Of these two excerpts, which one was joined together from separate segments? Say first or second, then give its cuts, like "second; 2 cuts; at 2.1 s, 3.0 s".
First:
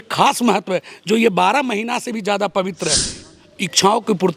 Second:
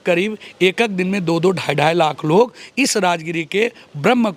first; 1 cut; at 3.2 s